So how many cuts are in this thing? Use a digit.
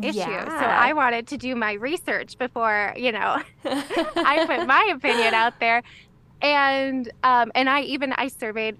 0